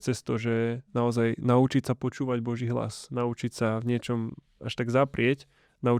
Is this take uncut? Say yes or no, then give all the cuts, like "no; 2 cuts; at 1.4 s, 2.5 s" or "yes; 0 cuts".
yes; 0 cuts